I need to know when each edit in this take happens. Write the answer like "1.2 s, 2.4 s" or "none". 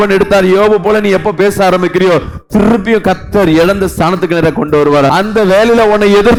none